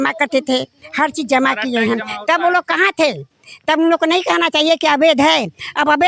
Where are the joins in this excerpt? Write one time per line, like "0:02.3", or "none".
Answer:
none